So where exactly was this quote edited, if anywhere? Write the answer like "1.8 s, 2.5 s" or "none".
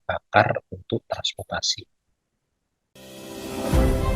2.8 s